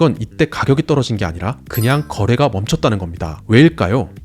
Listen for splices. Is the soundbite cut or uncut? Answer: uncut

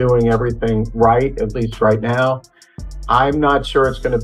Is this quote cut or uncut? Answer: uncut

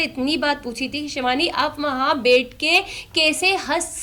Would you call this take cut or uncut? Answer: uncut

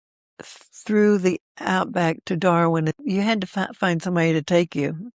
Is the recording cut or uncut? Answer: cut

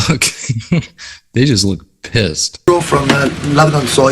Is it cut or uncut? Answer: cut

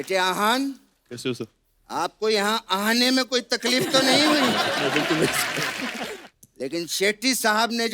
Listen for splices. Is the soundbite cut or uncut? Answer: cut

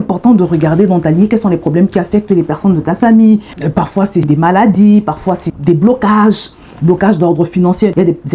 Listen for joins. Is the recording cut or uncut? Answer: cut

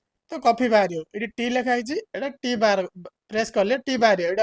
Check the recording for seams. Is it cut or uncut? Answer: uncut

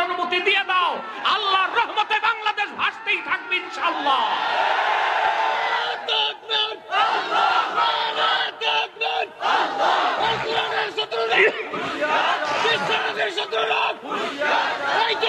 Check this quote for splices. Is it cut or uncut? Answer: uncut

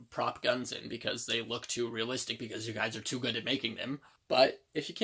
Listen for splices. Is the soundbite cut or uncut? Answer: cut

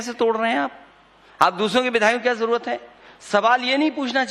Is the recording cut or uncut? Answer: uncut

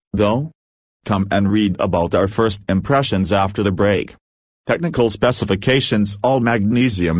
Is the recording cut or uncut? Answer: cut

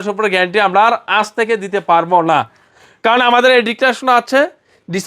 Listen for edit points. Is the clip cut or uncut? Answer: uncut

